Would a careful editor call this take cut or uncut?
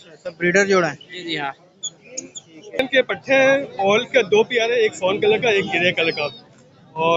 cut